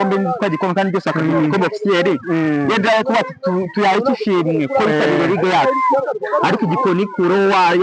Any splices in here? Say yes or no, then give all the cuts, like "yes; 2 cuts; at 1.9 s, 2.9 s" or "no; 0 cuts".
no; 0 cuts